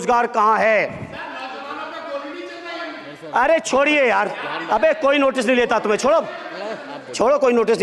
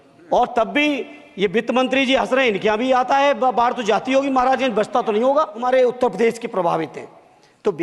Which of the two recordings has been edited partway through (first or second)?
second